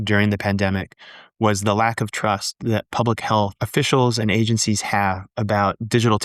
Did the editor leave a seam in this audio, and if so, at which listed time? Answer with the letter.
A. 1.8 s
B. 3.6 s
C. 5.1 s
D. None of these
B